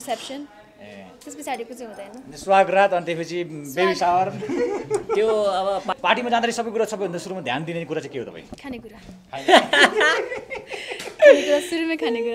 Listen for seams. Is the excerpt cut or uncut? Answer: cut